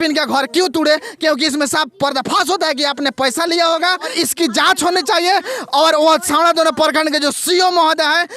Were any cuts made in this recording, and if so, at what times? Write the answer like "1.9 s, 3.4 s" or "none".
4.1 s